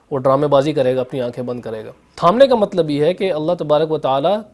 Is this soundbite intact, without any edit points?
no; 1 cut; at 2.1 s

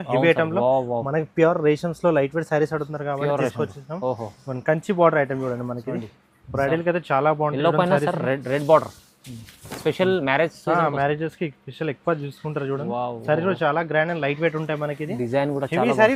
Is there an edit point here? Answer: no; 0 cuts

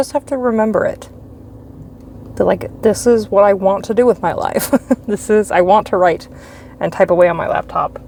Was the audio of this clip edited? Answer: no; 0 cuts

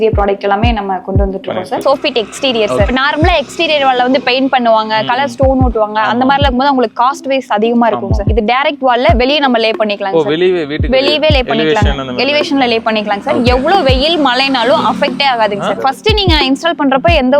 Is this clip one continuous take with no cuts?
no; 4 cuts; at 1.8 s, 2.9 s, 8.2 s, 15.8 s

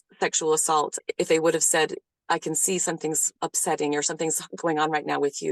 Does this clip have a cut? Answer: yes; 1 cut; at 3.3 s

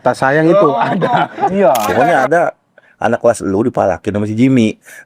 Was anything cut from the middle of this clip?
yes; 1 cut; at 1.9 s

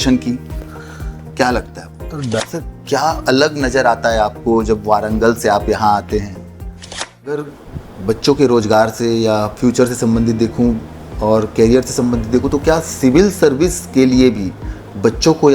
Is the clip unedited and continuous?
no; 2 cuts; at 2.3 s, 7.1 s

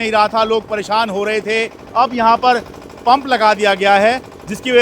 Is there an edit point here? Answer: yes; 1 cut; at 1.8 s

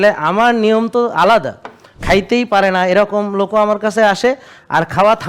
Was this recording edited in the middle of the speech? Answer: yes; 1 cut; at 1.9 s

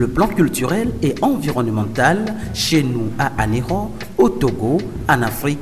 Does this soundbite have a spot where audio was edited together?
no; 0 cuts

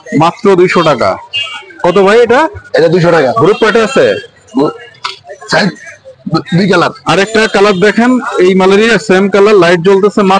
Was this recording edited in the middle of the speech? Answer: no; 0 cuts

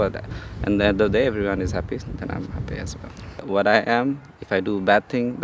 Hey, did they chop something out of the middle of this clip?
yes; 1 cut; at 3.4 s

